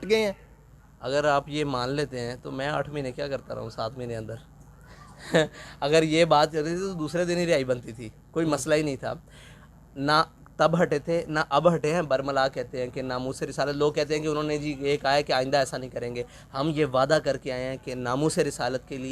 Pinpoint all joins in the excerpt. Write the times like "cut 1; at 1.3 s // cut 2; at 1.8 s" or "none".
none